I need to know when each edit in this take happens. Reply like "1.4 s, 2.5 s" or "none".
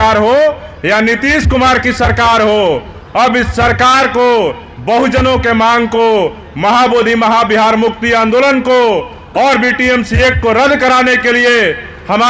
none